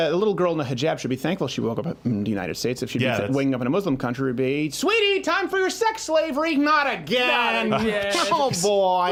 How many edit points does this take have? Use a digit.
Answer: 0